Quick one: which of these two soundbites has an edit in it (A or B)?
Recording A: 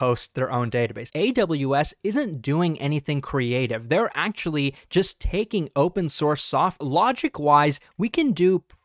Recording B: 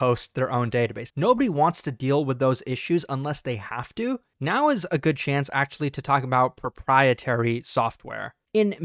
A